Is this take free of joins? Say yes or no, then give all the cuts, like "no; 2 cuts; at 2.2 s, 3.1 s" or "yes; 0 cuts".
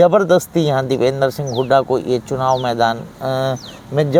yes; 0 cuts